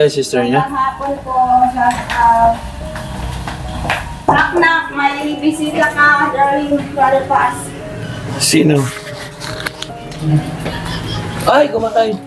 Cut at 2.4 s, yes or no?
no